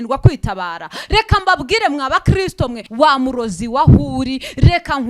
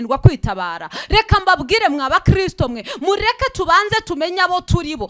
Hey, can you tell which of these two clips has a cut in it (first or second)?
first